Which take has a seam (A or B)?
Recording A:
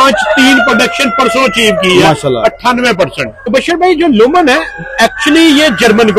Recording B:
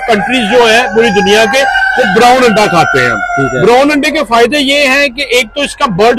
A